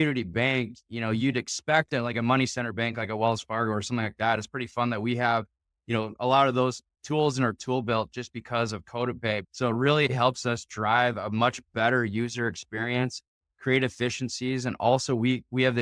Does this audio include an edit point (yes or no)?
yes